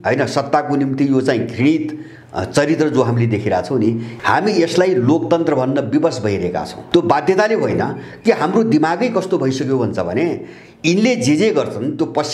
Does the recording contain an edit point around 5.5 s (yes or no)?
no